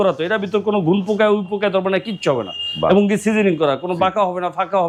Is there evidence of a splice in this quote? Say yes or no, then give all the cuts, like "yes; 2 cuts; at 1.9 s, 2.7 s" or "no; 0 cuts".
no; 0 cuts